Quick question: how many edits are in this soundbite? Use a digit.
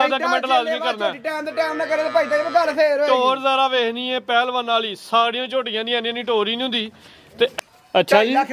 1